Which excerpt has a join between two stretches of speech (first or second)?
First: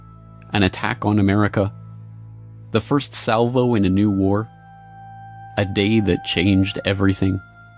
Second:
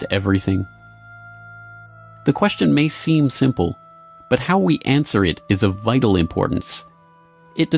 first